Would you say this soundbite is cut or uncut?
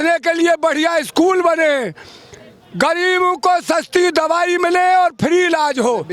uncut